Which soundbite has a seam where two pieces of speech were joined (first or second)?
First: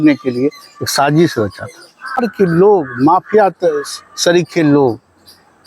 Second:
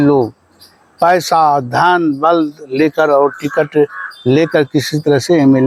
first